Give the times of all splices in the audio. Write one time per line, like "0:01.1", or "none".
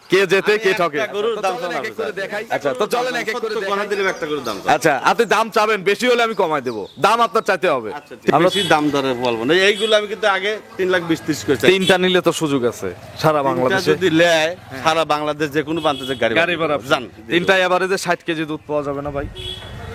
0:03.5
0:08.3